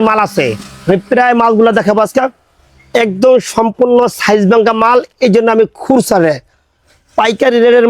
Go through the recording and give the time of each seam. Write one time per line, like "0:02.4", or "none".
none